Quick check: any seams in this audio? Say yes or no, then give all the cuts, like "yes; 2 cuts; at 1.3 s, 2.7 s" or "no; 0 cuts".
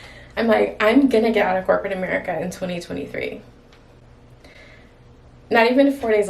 no; 0 cuts